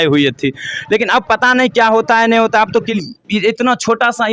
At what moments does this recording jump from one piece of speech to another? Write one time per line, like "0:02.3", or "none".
0:02.9